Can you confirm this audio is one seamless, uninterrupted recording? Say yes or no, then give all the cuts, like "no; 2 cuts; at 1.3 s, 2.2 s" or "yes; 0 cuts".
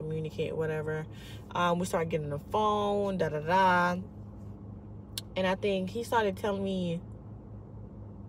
yes; 0 cuts